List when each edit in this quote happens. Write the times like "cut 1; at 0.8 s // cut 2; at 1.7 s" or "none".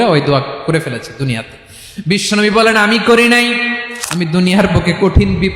cut 1; at 3.8 s